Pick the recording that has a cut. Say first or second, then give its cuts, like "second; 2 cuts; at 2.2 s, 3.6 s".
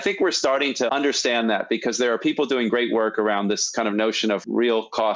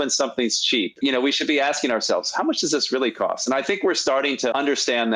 second; 1 cut; at 0.9 s